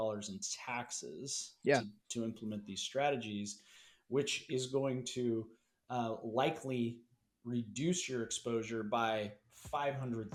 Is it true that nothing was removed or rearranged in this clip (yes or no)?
yes